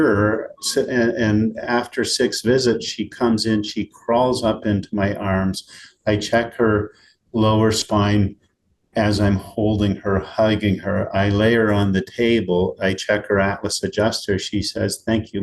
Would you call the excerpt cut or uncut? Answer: uncut